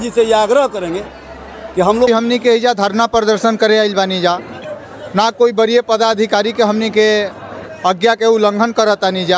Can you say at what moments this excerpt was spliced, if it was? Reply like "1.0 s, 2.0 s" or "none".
2.1 s